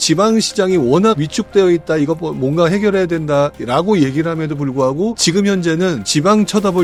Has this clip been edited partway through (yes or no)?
no